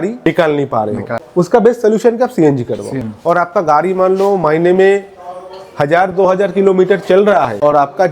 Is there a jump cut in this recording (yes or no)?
yes